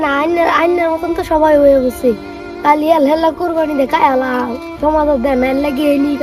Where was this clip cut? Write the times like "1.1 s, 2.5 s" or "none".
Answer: none

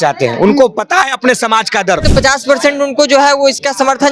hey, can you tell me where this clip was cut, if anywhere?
2.1 s

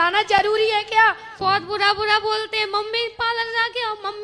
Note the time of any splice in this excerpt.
1.3 s

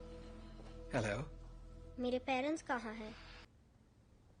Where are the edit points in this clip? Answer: 3.5 s

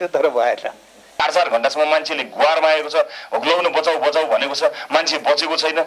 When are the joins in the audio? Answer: 1.1 s

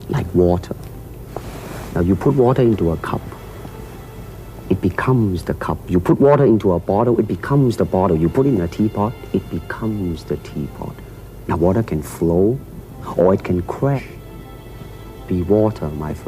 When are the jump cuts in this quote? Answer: 14.0 s

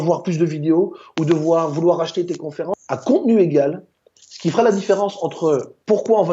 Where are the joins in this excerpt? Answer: 2.7 s

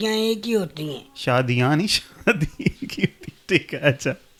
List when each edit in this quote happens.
none

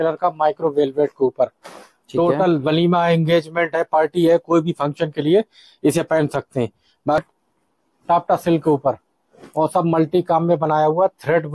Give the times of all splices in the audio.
7.2 s

